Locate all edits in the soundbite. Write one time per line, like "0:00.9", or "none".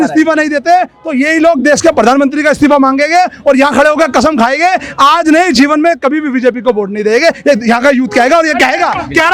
none